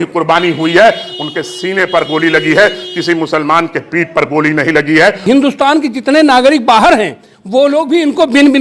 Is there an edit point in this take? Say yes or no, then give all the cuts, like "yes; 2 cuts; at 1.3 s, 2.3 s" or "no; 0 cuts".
yes; 1 cut; at 5.3 s